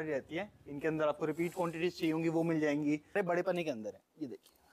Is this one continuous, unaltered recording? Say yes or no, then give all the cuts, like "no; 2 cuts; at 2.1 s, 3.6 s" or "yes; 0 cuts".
no; 1 cut; at 3.1 s